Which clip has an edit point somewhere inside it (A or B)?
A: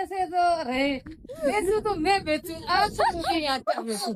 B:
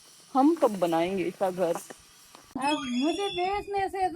B